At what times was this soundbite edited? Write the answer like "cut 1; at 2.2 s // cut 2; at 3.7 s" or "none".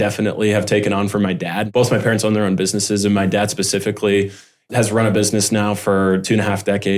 none

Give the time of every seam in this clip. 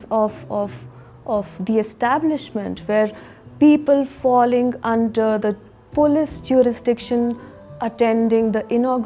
none

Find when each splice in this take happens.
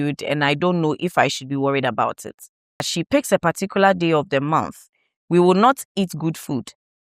cut 1; at 2.9 s

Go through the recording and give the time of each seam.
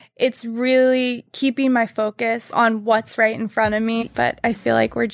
cut 1; at 2.5 s // cut 2; at 4.0 s

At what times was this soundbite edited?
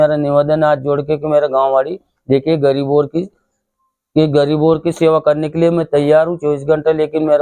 none

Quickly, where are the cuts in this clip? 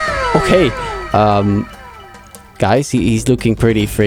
none

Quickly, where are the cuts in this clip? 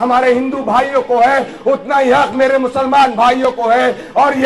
none

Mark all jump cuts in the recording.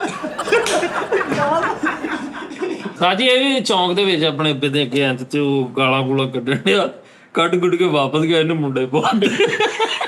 cut 1; at 3.0 s

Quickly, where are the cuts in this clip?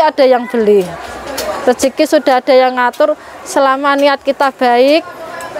none

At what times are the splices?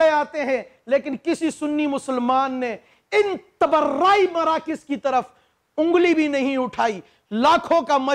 none

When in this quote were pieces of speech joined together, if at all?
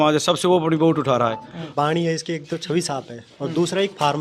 cut 1; at 1.7 s

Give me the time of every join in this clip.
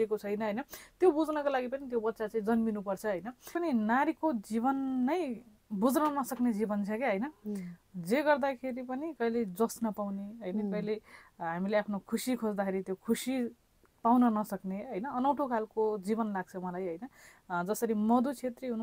cut 1; at 3.5 s

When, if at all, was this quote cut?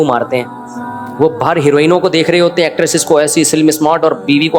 none

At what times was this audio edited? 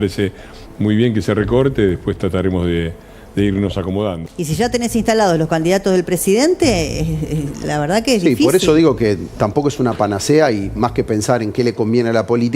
cut 1; at 4.2 s

